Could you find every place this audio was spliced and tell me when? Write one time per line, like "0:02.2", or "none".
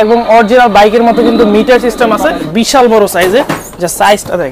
0:02.4